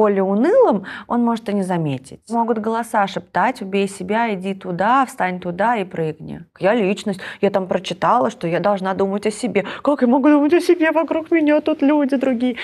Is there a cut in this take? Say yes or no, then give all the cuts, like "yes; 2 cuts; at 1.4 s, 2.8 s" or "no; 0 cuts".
yes; 2 cuts; at 2.3 s, 6.6 s